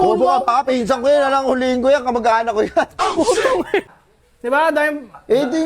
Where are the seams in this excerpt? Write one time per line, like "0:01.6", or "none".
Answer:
0:03.8